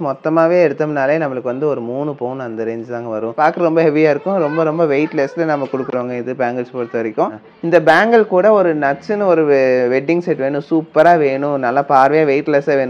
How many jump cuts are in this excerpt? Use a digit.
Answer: 2